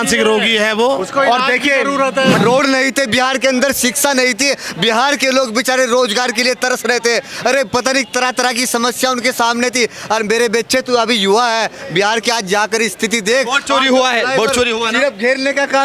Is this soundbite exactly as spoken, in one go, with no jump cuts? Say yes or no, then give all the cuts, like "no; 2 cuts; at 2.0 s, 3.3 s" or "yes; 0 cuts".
no; 1 cut; at 2.4 s